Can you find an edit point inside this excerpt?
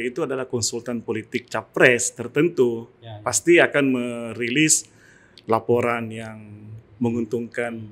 no; 0 cuts

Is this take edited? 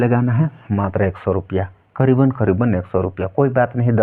no; 0 cuts

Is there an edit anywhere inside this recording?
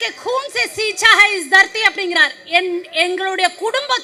no; 0 cuts

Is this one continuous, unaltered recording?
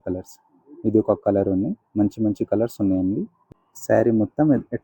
no; 1 cut; at 3.4 s

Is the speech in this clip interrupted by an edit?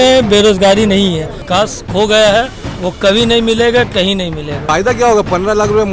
yes; 2 cuts; at 1.4 s, 4.6 s

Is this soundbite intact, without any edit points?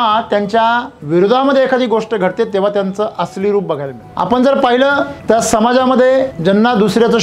no; 4 cuts; at 0.9 s, 4.0 s, 5.2 s, 6.3 s

